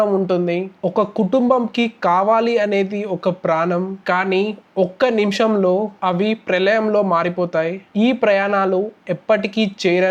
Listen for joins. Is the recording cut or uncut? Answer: uncut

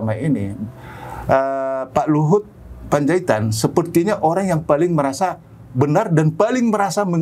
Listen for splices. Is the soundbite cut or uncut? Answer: uncut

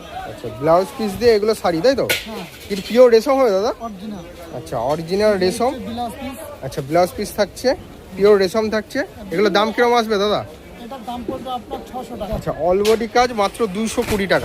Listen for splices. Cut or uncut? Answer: cut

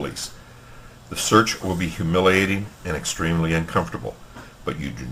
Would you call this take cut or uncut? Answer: cut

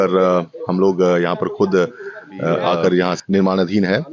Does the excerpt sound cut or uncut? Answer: cut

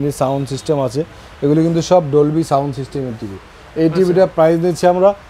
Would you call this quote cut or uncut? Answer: uncut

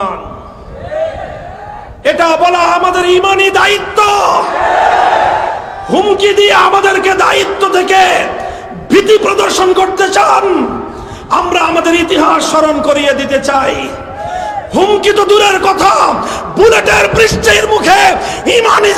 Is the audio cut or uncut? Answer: uncut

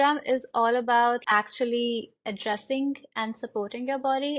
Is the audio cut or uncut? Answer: cut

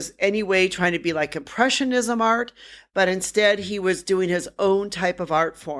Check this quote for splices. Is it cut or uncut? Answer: uncut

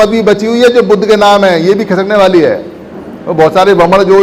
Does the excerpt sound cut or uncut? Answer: uncut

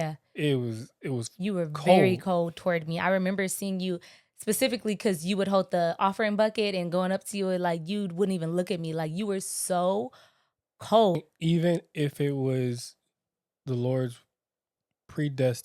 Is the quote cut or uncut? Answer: cut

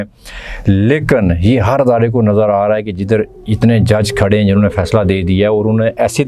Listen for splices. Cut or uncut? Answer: uncut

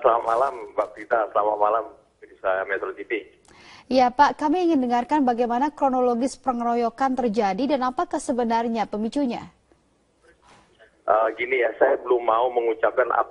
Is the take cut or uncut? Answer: cut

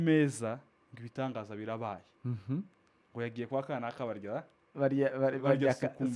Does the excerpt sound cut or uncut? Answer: uncut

